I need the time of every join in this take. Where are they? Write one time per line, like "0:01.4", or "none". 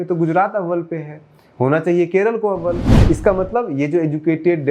0:02.9